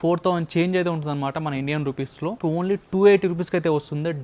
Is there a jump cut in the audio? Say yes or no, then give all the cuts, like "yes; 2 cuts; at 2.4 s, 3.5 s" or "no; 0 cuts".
yes; 1 cut; at 2.4 s